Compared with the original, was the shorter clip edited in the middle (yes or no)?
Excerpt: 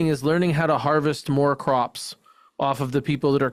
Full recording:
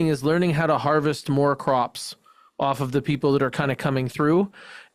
no